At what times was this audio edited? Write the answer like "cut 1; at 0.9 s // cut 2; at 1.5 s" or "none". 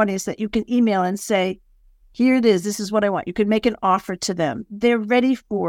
cut 1; at 4.7 s